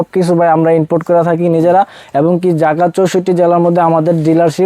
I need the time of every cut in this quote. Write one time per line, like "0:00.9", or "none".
none